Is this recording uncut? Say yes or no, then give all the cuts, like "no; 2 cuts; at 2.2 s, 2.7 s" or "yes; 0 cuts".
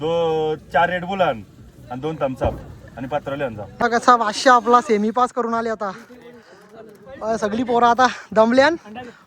no; 1 cut; at 3.8 s